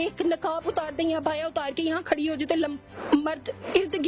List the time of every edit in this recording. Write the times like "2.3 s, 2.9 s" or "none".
none